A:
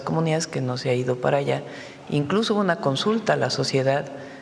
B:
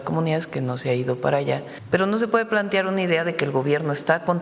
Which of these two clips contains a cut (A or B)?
B